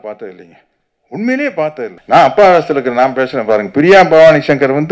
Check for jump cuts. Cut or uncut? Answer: cut